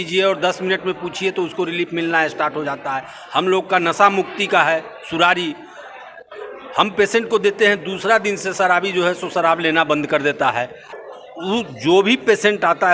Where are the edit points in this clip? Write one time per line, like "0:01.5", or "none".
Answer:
0:10.8